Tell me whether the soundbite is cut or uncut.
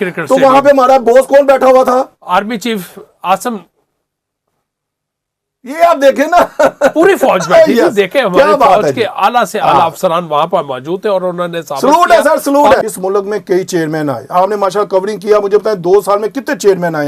cut